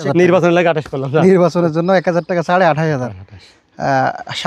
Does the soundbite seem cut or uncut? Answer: uncut